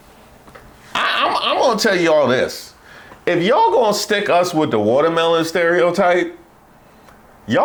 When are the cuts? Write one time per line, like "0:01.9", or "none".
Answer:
none